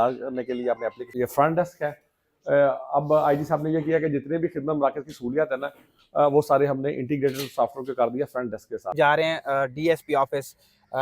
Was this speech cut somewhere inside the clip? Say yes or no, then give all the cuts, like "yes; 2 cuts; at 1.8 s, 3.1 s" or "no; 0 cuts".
yes; 2 cuts; at 1.1 s, 8.9 s